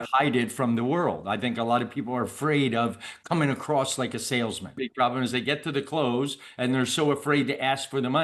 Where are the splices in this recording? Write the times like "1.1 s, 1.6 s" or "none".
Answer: 4.9 s